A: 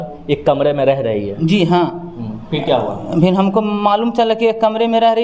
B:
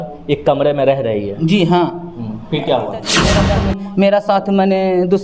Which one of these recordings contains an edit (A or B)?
B